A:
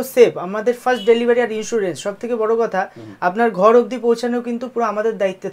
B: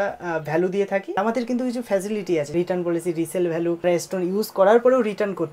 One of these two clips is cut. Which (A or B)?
B